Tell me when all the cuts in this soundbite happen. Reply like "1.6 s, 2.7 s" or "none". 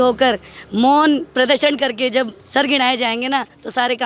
none